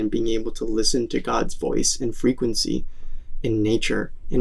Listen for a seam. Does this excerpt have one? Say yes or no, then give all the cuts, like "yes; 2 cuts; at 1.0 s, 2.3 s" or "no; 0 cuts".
no; 0 cuts